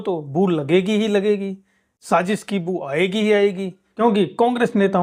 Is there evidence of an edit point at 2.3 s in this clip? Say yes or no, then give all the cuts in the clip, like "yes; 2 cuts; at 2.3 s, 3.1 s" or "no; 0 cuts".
no; 0 cuts